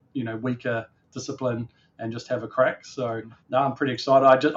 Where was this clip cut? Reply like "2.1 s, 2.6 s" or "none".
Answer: 3.3 s